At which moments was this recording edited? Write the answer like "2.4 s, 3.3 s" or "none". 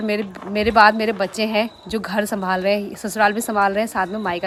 none